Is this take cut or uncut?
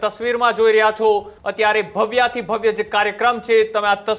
cut